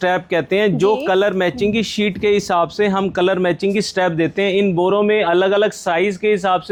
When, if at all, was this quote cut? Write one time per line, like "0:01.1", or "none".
none